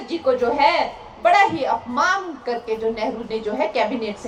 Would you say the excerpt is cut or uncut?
uncut